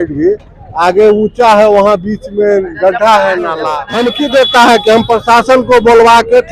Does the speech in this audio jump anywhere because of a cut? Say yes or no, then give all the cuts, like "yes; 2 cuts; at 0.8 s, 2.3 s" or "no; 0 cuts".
yes; 1 cut; at 3.8 s